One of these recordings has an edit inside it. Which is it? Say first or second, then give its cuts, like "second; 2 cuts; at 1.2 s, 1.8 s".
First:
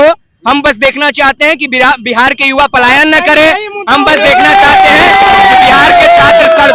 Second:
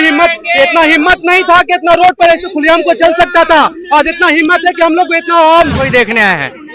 second; 1 cut; at 5.8 s